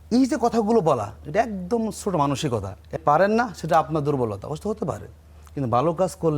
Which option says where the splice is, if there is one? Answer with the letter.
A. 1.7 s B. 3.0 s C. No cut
B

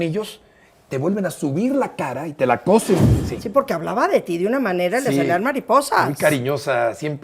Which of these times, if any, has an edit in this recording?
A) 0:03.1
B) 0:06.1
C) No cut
A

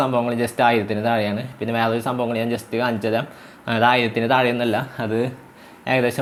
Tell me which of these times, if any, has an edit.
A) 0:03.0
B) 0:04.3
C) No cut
C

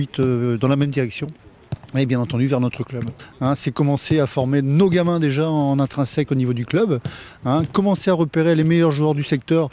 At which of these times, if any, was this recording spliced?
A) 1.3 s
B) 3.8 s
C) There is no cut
C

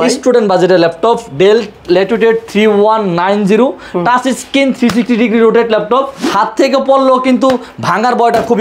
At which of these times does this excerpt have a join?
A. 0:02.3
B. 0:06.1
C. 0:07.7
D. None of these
B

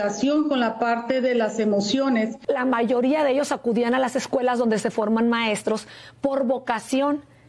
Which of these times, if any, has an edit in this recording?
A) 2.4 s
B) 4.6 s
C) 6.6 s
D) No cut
A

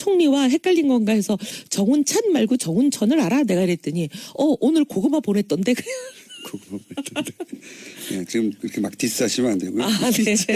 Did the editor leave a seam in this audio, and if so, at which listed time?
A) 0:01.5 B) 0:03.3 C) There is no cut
C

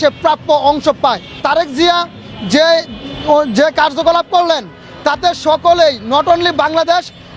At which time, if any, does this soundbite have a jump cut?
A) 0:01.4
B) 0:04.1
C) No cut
A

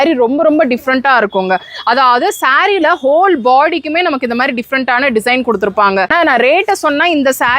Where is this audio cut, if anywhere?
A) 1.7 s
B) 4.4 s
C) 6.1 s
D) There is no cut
C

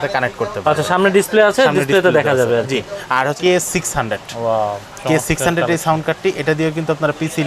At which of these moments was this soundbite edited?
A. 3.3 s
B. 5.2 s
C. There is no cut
A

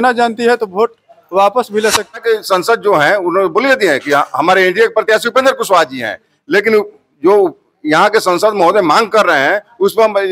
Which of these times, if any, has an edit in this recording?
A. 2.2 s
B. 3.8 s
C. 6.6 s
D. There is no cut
A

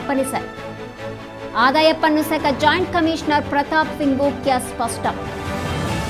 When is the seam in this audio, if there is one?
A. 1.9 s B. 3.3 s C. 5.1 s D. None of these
C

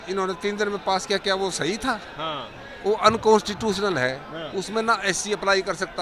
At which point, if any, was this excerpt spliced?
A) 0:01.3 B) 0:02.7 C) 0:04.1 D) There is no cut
D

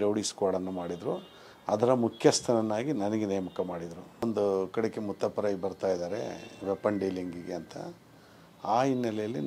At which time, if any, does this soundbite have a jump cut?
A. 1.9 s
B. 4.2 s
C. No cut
B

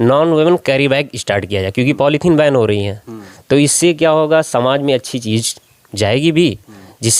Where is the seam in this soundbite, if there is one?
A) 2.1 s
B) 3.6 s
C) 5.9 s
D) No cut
D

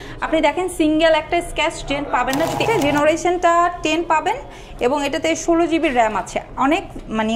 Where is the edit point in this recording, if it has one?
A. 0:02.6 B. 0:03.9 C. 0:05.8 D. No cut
A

